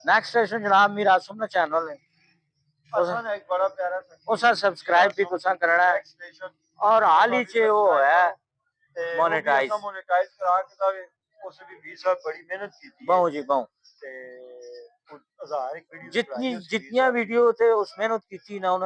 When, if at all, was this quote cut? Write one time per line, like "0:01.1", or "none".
none